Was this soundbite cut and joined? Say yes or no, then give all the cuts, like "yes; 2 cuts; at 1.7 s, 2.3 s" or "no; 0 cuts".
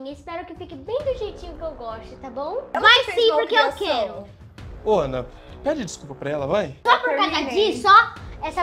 yes; 2 cuts; at 2.8 s, 6.8 s